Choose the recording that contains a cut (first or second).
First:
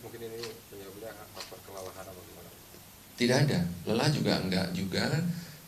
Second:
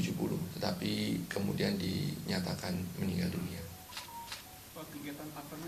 first